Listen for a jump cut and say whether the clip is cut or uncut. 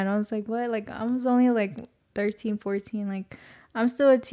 uncut